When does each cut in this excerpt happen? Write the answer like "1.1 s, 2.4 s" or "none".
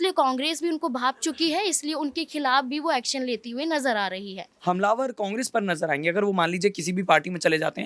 4.5 s